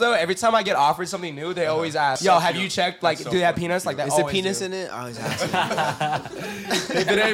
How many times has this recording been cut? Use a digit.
1